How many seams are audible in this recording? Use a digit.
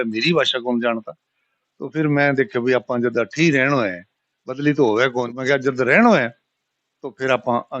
1